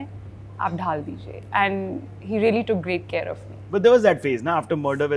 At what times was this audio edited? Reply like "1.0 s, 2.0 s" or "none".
none